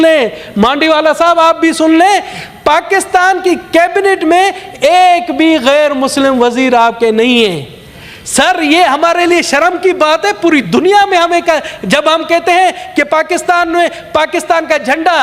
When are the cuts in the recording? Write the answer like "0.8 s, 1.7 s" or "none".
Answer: none